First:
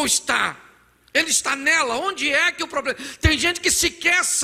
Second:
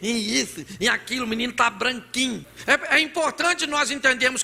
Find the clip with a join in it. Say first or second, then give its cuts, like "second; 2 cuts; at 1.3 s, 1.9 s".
second; 1 cut; at 2.5 s